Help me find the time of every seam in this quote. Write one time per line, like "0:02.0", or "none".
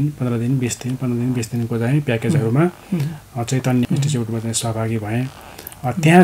0:03.9

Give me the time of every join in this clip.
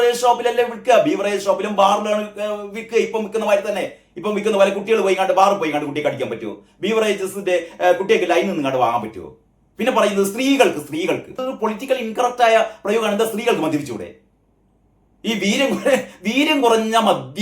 0:11.4

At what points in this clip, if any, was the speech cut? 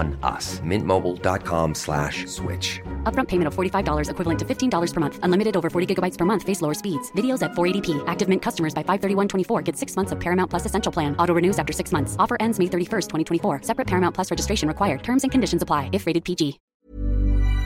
0:16.6

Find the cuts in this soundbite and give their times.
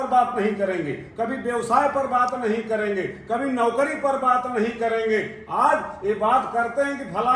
none

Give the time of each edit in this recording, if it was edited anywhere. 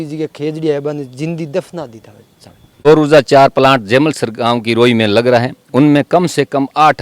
0:02.8

